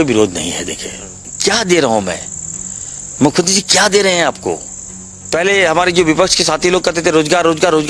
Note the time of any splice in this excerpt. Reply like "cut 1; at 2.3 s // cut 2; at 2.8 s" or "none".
cut 1; at 1.3 s // cut 2; at 5.2 s